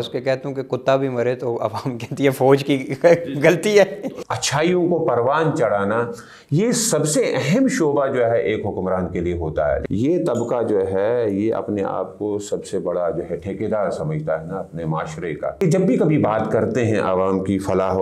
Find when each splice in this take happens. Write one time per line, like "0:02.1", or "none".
0:04.1
0:09.8
0:15.6